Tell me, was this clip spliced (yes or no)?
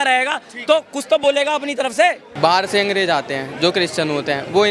yes